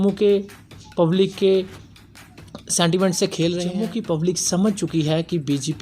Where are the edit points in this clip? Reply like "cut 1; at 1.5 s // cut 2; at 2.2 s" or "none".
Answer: cut 1; at 3.8 s